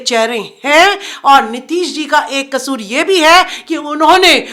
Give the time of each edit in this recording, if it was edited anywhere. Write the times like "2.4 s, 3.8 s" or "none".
none